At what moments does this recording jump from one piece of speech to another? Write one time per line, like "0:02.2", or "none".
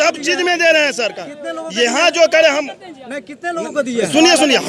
none